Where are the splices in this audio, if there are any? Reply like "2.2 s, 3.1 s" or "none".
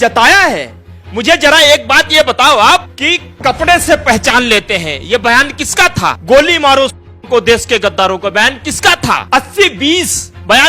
3.0 s, 6.2 s, 9.2 s